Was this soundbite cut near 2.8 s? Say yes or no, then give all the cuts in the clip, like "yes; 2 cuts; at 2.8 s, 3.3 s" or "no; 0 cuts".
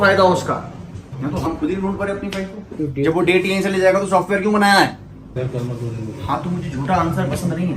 yes; 3 cuts; at 1.5 s, 2.8 s, 5.4 s